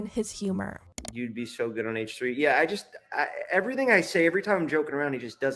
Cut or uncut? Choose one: uncut